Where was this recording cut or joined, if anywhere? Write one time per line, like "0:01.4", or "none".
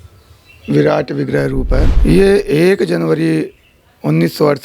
0:01.9